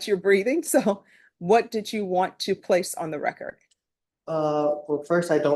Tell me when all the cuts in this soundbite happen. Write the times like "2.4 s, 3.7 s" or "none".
none